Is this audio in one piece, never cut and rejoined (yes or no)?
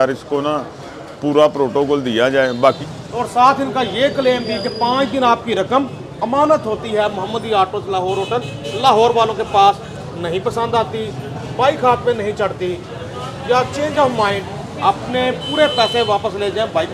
no